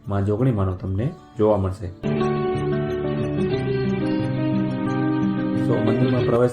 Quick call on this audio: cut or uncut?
cut